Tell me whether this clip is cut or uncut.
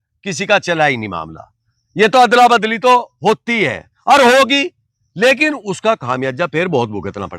uncut